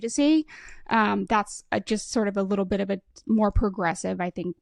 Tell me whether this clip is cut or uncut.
uncut